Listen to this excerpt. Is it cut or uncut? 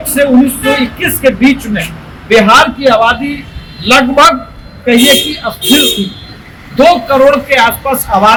uncut